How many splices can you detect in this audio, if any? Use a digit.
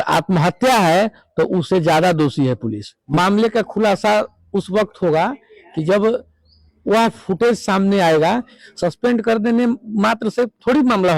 2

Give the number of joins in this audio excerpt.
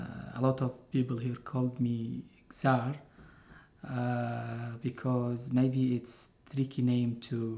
1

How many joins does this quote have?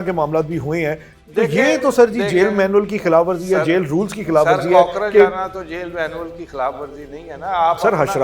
0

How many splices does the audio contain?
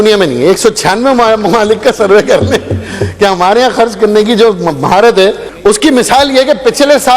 1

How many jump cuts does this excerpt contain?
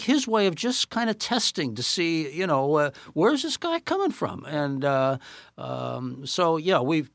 0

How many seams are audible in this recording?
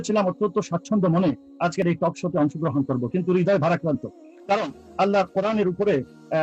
0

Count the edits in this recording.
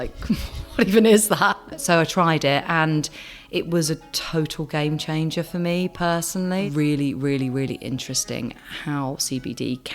2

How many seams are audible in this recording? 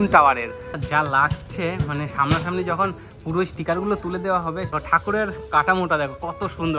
2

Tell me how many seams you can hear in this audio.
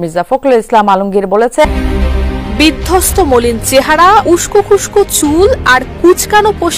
1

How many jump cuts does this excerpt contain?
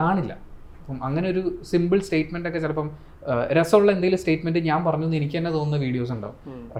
0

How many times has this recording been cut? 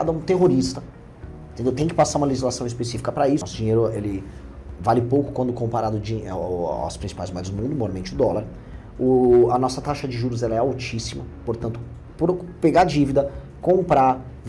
1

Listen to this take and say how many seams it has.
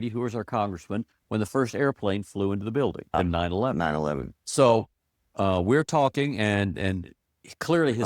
2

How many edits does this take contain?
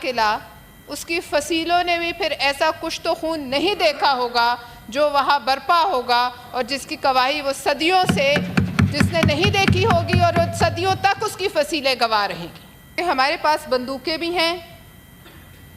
1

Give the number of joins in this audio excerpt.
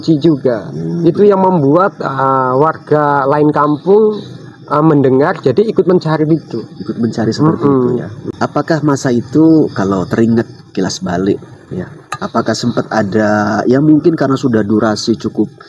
1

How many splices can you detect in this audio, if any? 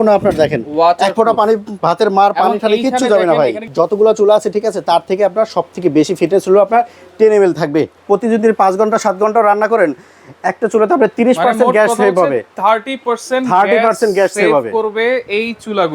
2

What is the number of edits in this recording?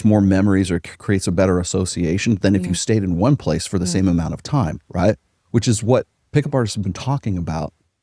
0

